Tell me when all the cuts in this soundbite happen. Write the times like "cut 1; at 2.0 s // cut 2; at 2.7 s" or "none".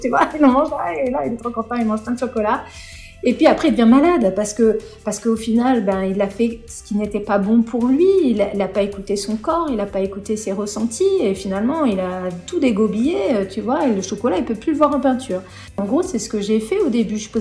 cut 1; at 15.8 s